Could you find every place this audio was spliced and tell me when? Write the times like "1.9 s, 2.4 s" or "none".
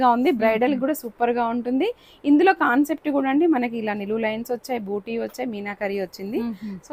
none